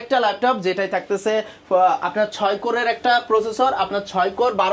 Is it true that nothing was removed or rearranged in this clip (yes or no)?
yes